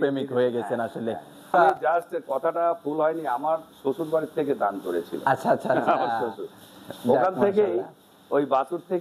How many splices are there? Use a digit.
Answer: 1